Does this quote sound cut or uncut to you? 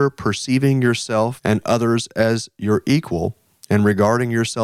cut